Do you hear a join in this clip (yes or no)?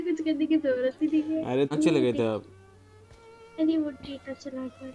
yes